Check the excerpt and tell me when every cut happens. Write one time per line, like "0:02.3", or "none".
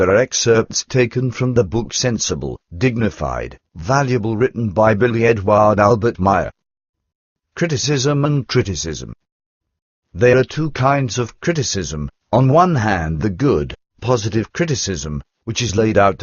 none